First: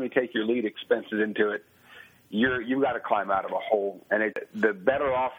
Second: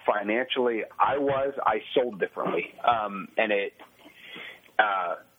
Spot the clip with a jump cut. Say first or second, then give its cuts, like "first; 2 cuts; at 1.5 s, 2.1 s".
first; 1 cut; at 4.4 s